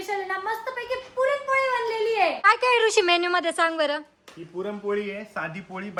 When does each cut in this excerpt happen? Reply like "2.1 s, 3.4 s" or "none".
none